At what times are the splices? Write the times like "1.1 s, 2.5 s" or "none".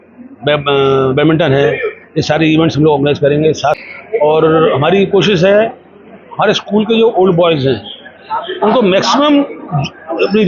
3.8 s